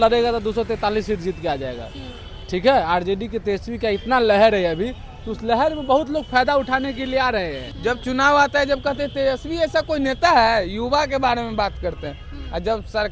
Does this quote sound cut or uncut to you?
cut